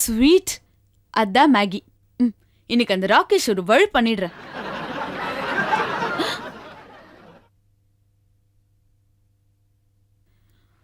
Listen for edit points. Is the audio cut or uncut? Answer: uncut